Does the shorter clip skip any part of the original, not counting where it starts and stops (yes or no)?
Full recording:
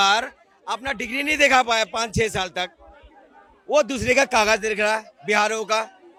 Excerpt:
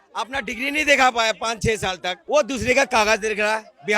yes